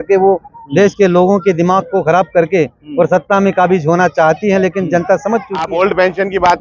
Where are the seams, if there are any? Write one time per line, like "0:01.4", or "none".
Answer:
0:05.7